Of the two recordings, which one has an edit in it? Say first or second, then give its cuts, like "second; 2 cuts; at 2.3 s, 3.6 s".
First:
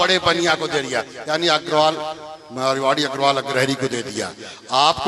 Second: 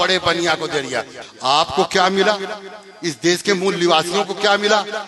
second; 1 cut; at 1.1 s